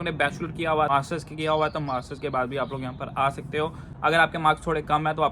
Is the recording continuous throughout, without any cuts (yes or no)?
no